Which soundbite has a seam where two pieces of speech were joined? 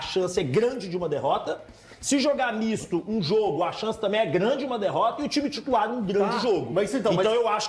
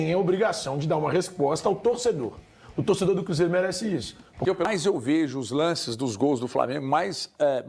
second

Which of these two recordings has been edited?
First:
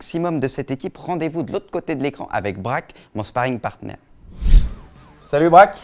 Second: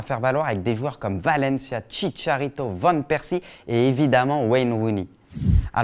second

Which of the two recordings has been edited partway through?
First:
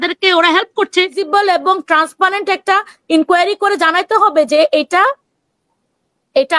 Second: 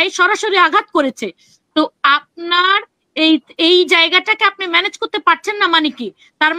first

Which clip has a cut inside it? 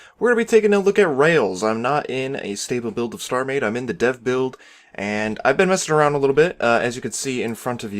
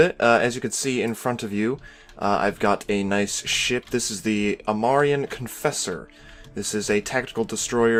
first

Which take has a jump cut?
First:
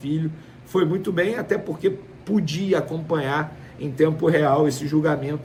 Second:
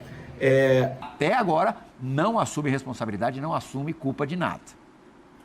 second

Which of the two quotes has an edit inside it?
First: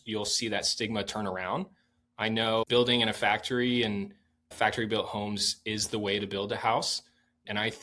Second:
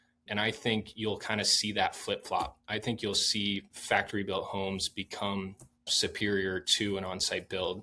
first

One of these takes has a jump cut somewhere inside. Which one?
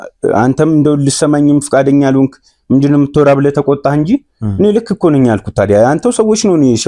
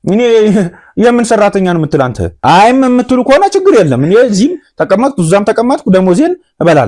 second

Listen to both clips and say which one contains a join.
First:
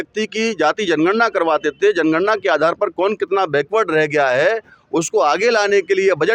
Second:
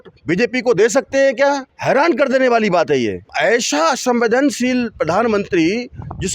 second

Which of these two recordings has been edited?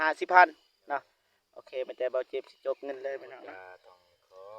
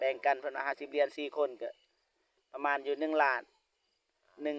first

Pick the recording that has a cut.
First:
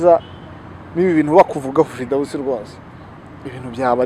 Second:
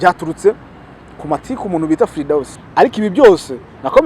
second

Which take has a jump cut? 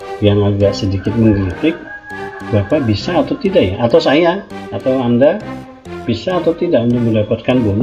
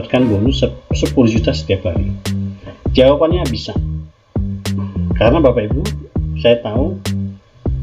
second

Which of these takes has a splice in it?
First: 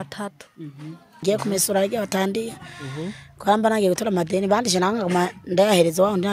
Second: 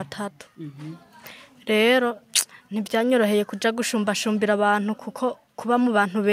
first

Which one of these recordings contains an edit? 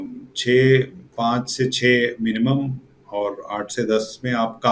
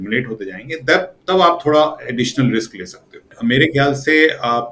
second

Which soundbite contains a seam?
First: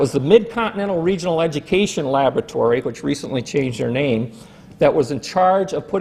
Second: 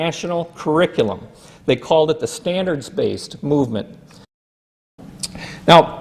second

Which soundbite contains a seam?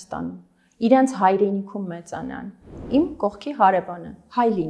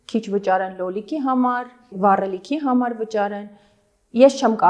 first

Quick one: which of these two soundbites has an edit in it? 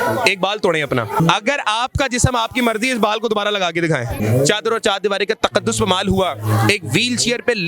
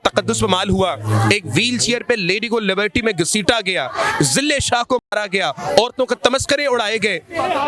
first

